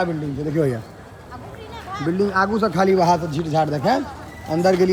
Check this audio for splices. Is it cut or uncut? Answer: uncut